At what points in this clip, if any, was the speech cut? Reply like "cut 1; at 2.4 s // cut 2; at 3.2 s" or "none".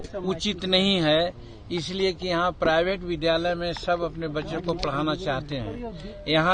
none